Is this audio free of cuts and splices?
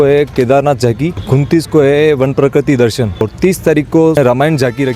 no; 3 cuts; at 1.2 s, 3.2 s, 4.1 s

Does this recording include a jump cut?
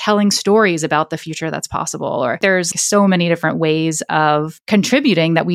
yes; 2 cuts; at 2.7 s, 4.5 s

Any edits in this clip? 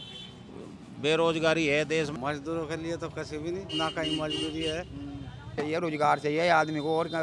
yes; 2 cuts; at 2.1 s, 5.5 s

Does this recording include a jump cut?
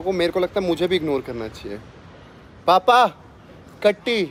no; 0 cuts

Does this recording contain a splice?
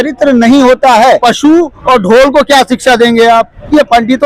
yes; 1 cut; at 1.2 s

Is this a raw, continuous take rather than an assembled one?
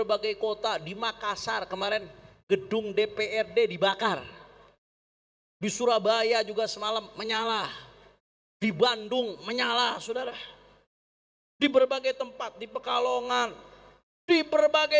yes; 0 cuts

